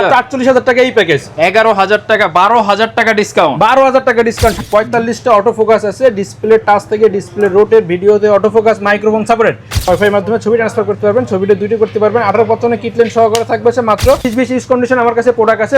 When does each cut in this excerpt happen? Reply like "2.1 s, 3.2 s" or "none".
4.6 s, 9.9 s, 14.2 s